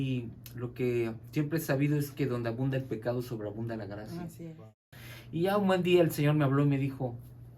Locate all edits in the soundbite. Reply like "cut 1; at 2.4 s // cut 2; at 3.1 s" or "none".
cut 1; at 4.7 s